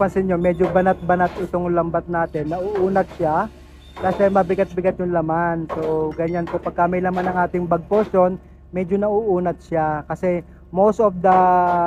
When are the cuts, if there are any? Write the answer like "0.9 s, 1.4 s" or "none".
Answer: none